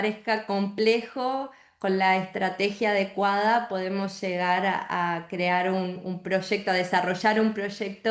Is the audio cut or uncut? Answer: uncut